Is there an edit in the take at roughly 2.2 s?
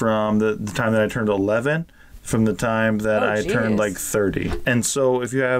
no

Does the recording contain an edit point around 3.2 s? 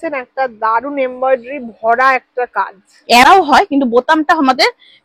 yes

